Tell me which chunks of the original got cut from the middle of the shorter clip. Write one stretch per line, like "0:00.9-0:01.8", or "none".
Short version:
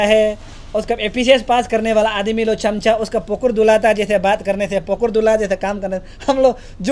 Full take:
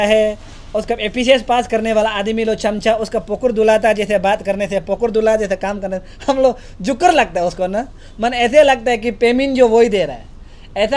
none